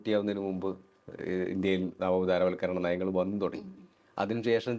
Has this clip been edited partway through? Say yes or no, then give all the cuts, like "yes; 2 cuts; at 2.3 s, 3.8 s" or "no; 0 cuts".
no; 0 cuts